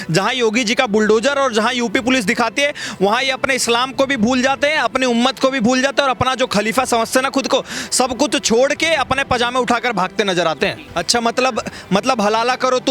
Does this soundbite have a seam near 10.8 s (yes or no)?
yes